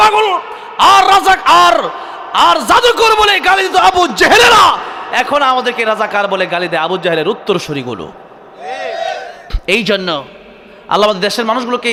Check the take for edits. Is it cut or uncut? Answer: uncut